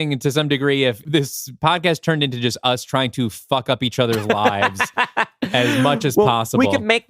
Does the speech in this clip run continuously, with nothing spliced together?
no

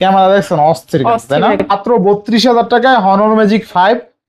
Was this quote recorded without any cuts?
no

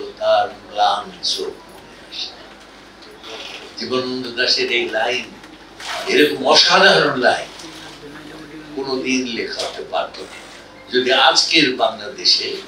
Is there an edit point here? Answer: no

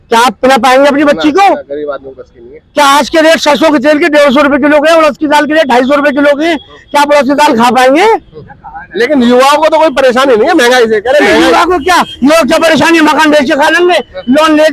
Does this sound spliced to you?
no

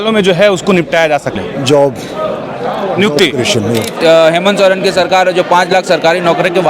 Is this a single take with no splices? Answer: no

